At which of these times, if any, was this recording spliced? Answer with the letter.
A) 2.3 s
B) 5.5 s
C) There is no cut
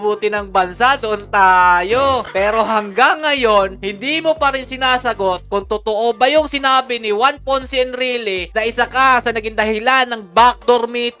A